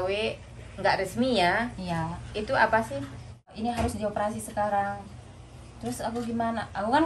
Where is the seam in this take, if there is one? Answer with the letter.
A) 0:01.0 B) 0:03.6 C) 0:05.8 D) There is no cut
B